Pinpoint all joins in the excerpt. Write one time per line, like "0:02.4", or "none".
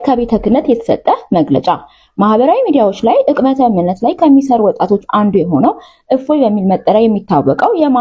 none

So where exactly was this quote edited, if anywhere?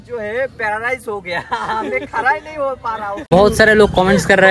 0:03.3

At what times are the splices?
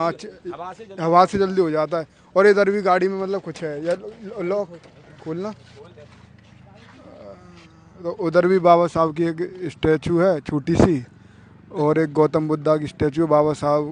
none

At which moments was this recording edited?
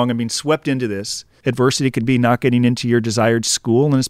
0:01.3

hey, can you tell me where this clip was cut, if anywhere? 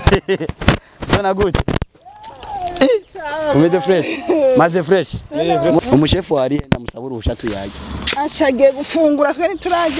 0:05.8

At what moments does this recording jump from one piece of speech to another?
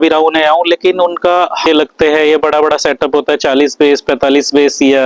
0:01.6

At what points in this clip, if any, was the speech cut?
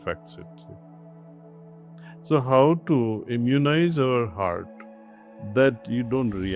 none

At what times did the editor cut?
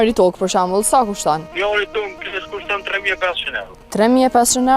0:01.5
0:03.8

